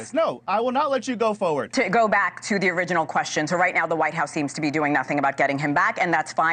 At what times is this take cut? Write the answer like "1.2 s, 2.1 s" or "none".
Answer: 1.7 s